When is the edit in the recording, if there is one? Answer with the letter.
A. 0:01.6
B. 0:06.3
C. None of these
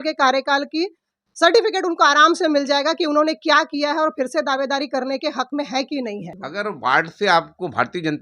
B